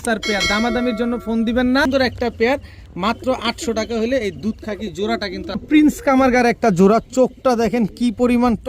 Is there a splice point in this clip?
yes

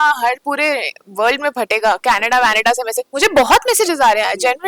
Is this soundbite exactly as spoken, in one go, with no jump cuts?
yes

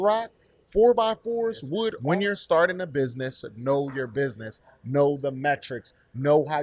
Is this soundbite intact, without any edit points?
no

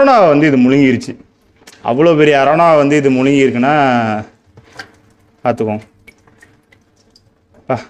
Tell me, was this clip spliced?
no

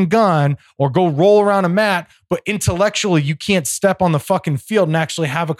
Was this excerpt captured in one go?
yes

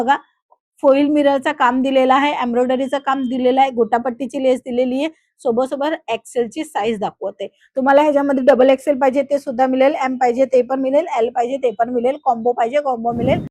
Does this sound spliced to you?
no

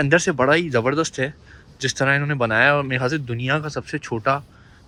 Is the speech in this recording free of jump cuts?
yes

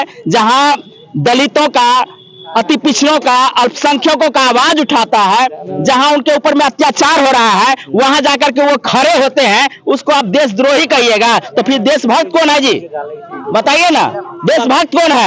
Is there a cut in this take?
no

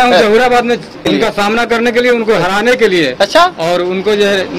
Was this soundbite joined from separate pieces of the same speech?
yes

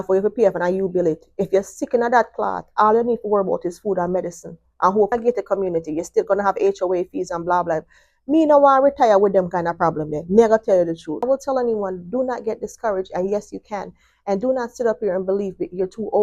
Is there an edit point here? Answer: yes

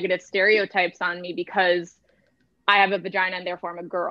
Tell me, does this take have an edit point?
no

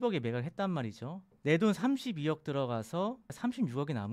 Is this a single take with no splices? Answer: no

